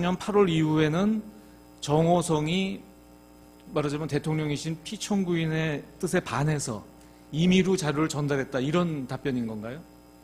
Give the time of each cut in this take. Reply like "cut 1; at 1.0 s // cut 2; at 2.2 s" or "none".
cut 1; at 9.0 s